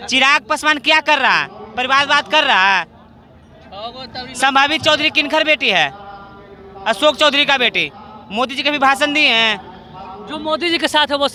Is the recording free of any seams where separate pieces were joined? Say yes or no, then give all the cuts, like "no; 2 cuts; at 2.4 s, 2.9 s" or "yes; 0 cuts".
yes; 0 cuts